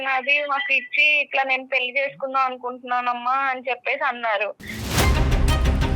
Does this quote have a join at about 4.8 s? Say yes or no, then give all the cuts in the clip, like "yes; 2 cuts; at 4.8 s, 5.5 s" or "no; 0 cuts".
yes; 1 cut; at 4.8 s